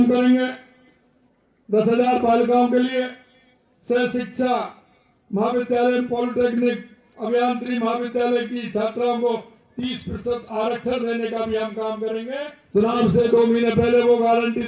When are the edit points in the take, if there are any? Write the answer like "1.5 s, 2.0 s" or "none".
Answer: 12.6 s